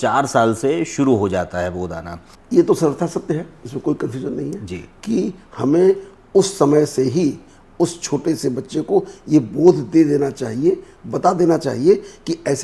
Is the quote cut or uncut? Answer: cut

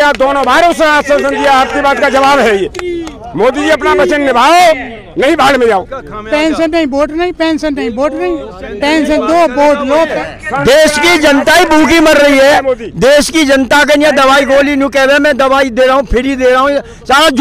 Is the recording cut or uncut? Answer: cut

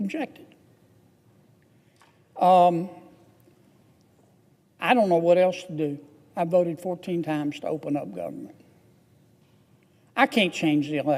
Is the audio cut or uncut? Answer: uncut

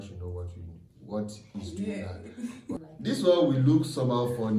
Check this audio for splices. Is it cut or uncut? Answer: cut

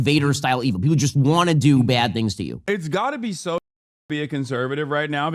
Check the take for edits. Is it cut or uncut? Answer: cut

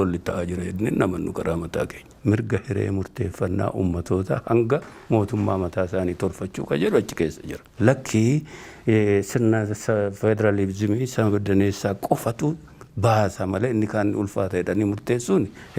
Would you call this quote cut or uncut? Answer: cut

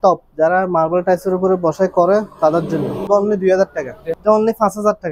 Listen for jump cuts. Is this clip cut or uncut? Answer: cut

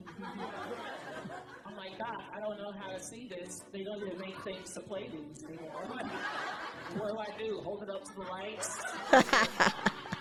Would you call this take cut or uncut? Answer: uncut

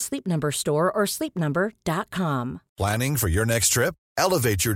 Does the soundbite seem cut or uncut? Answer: cut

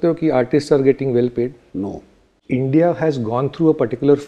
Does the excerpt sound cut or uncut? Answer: cut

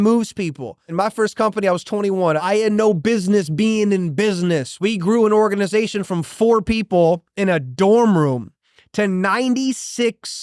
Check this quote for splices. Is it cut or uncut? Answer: cut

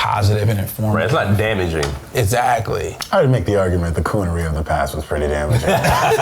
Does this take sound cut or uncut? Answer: cut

